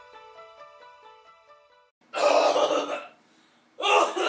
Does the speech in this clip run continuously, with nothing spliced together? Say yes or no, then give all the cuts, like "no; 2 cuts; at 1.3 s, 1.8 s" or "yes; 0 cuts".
yes; 0 cuts